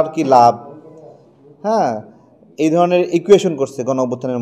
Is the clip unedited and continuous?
yes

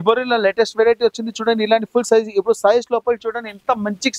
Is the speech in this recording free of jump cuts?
yes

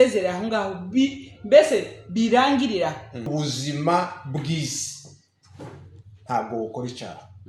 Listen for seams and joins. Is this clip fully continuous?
no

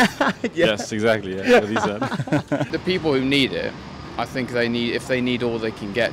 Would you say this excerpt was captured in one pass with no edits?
yes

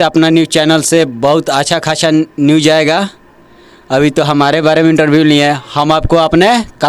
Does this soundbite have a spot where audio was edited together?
no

